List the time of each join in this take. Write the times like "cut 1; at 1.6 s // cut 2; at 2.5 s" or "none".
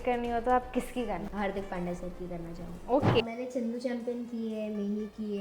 cut 1; at 1.2 s // cut 2; at 3.2 s